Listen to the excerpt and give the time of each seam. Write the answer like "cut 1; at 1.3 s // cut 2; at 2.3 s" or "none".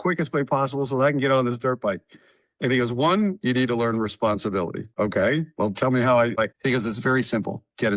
cut 1; at 4.9 s // cut 2; at 6.4 s